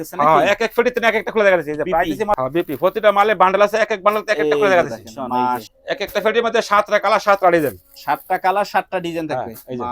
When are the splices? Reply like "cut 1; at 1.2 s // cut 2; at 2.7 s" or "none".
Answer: cut 1; at 2.4 s // cut 2; at 5.7 s